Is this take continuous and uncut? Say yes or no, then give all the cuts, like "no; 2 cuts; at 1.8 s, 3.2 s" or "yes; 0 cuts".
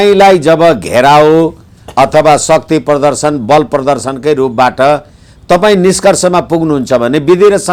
yes; 0 cuts